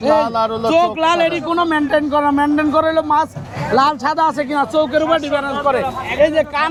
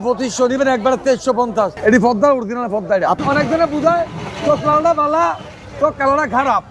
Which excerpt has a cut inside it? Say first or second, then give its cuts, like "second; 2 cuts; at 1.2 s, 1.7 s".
second; 2 cuts; at 1.7 s, 3.2 s